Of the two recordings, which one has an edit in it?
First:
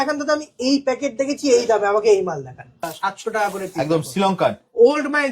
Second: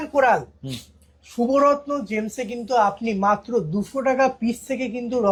first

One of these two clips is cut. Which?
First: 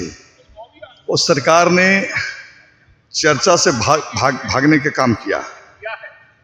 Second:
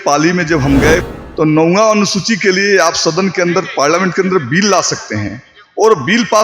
second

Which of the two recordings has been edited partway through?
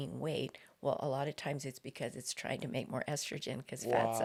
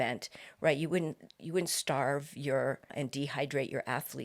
second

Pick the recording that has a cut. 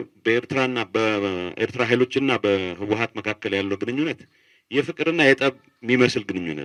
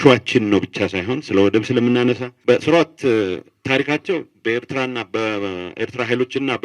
second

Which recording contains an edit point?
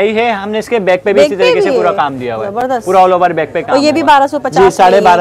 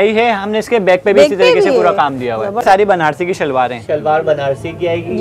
second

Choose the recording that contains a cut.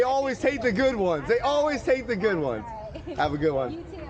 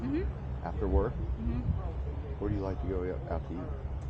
first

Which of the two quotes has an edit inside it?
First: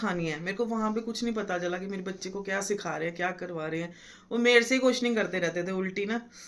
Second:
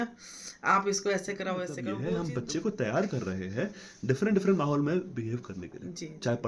second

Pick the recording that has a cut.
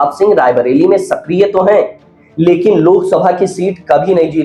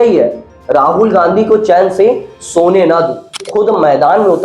second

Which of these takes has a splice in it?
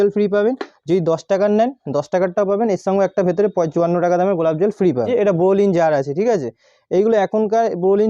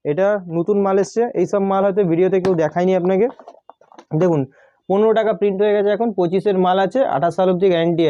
first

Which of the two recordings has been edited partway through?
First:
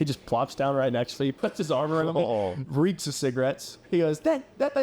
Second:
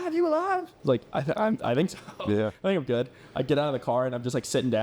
first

